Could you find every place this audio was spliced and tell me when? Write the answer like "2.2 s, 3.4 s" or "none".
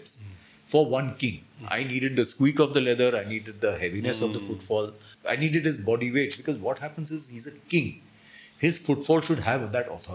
5.1 s